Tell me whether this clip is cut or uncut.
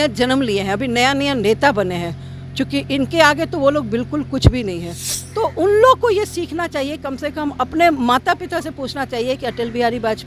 uncut